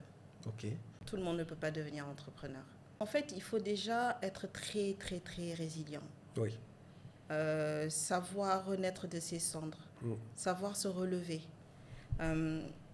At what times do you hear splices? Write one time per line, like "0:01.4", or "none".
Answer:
0:00.9
0:03.0